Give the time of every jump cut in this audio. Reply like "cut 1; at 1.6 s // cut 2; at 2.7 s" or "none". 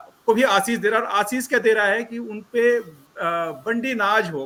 none